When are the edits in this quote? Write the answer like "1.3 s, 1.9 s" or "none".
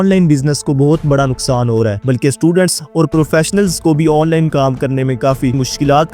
2.0 s

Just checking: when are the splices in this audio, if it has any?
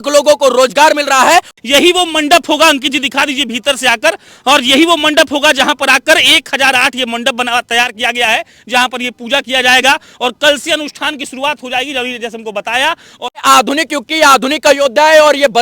1.5 s, 13.4 s

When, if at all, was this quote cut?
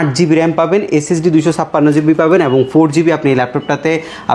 none

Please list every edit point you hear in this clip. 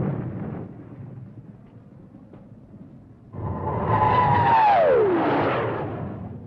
2.3 s

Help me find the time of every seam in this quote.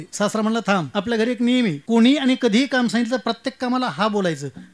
0.9 s, 1.8 s

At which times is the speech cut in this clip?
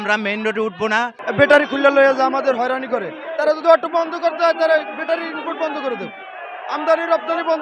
1.2 s

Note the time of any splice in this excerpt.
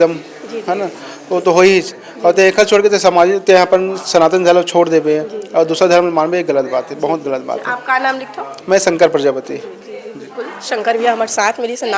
none

